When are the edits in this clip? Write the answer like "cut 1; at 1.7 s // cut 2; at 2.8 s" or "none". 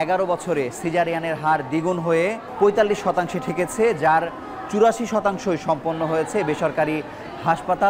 cut 1; at 2.4 s